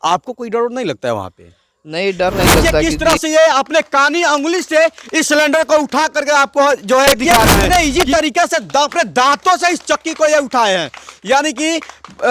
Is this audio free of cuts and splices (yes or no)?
no